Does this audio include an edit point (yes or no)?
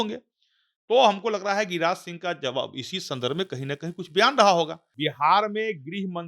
yes